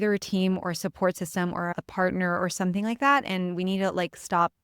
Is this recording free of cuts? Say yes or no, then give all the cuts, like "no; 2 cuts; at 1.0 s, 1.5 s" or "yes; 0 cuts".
no; 1 cut; at 1.7 s